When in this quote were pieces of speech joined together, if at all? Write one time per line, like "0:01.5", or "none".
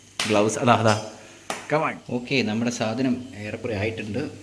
0:02.0